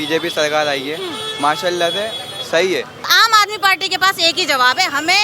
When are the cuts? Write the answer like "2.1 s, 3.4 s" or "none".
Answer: 3.1 s